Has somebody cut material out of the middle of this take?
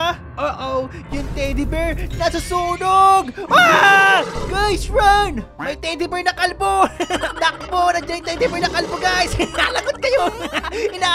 no; 0 cuts

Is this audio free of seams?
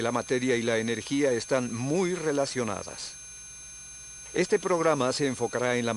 yes; 0 cuts

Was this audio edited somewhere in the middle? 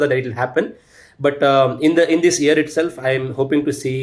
no; 0 cuts

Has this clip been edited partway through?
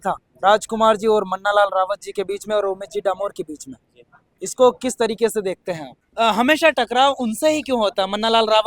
yes; 1 cut; at 6.0 s

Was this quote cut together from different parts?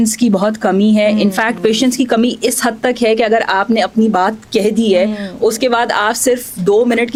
no; 0 cuts

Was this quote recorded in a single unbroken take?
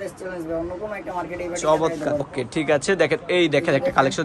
no; 1 cut; at 2.3 s

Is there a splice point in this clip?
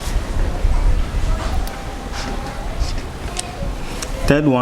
no; 0 cuts

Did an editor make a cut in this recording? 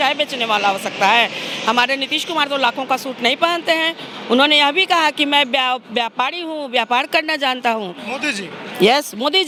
no; 0 cuts

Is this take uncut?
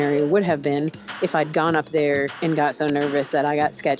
no; 1 cut; at 2.3 s

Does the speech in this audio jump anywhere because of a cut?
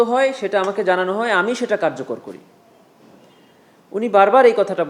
no; 0 cuts

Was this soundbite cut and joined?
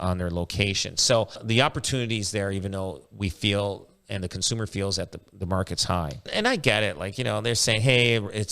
yes; 2 cuts; at 1.4 s, 6.3 s

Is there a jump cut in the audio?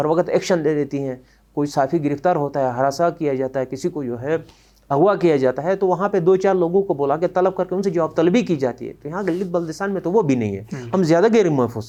no; 0 cuts

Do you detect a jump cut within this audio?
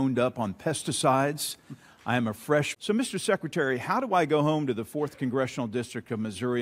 no; 0 cuts

